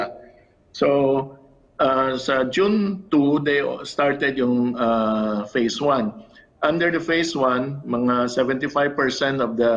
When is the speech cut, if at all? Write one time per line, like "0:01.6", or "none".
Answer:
none